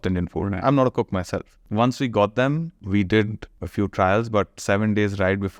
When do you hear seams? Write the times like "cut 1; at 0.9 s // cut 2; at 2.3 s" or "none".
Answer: cut 1; at 1.6 s // cut 2; at 2.8 s // cut 3; at 3.6 s